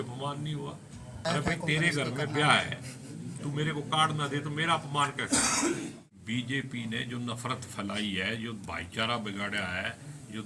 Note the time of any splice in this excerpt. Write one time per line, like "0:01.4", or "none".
0:01.2
0:06.0